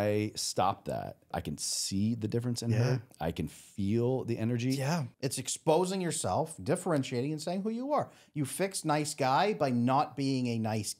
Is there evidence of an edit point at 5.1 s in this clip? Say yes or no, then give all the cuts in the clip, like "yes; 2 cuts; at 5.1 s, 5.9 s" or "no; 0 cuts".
yes; 2 cuts; at 1.2 s, 5.1 s